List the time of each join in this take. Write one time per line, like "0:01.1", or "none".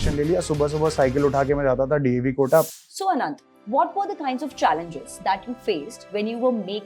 0:02.8